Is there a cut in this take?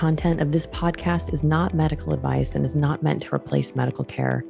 no; 0 cuts

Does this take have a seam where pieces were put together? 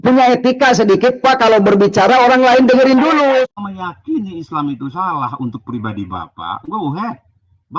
yes; 1 cut; at 3.5 s

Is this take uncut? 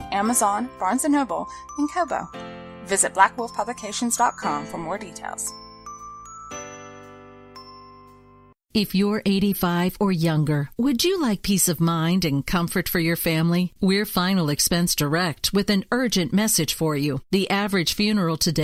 yes; 0 cuts

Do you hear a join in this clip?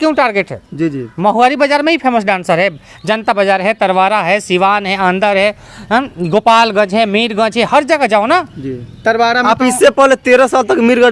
no; 0 cuts

